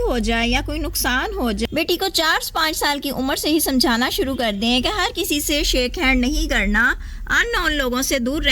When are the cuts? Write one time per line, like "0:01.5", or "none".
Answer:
0:01.7